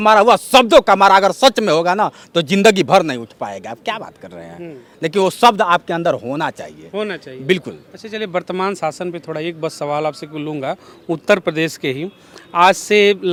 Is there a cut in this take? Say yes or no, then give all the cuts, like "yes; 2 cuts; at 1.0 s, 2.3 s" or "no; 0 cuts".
no; 0 cuts